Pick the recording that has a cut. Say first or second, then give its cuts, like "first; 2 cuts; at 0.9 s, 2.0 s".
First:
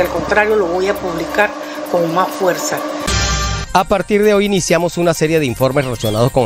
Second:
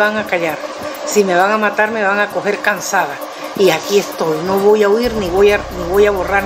first; 1 cut; at 3.1 s